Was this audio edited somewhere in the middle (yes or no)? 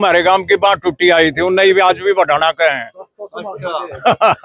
no